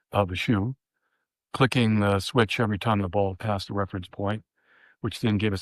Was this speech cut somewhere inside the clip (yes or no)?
no